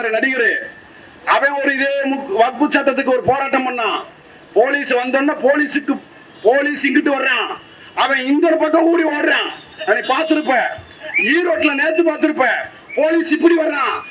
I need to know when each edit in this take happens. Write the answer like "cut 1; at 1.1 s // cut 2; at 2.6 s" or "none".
none